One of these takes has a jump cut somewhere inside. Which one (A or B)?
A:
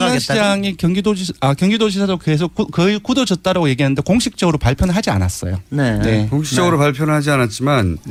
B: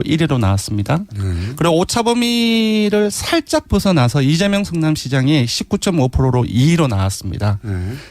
B